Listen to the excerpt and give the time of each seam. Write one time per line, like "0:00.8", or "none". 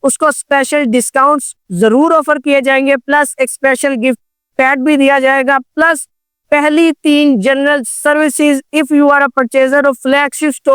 none